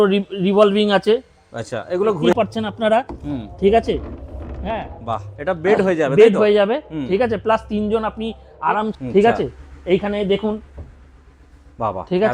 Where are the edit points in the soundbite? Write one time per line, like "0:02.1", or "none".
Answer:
0:02.3
0:08.9